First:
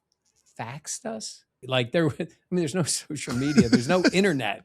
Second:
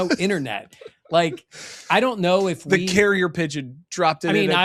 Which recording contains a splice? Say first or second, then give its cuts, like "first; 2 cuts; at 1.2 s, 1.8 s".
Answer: first; 1 cut; at 1.6 s